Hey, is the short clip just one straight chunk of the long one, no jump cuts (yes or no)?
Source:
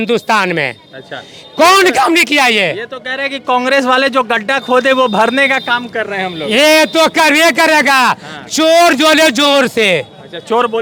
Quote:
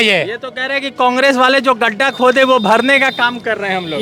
yes